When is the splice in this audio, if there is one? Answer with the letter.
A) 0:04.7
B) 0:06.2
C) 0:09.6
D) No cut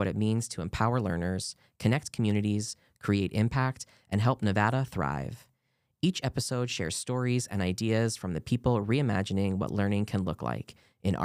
D